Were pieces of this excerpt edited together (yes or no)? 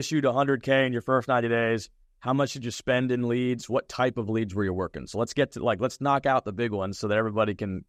no